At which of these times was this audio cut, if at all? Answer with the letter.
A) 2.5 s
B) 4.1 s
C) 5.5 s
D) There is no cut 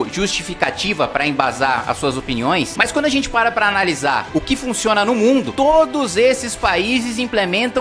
C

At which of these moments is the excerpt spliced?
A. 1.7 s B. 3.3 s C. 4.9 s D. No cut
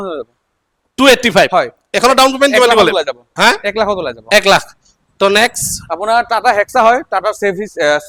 D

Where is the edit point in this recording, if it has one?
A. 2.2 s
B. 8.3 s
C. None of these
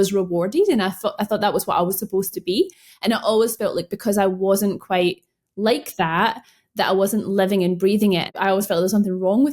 B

